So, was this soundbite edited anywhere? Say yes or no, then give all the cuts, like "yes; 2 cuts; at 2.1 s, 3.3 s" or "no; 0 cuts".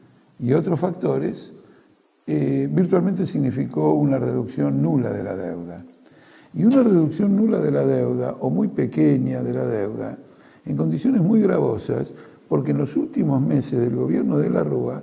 no; 0 cuts